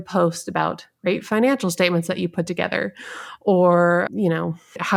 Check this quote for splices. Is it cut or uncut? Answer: uncut